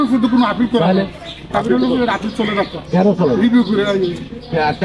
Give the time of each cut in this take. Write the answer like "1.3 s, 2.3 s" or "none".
none